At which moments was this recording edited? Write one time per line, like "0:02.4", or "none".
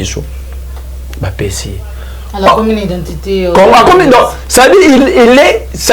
none